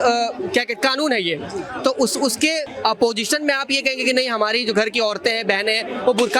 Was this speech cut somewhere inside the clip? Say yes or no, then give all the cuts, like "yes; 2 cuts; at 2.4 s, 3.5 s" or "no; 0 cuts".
yes; 1 cut; at 2.7 s